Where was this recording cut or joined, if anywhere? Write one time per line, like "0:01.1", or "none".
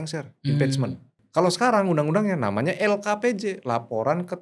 0:01.1